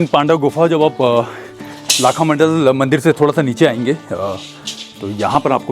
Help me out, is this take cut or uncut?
uncut